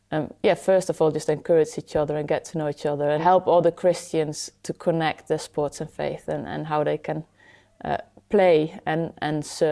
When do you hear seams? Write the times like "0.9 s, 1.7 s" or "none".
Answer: 3.2 s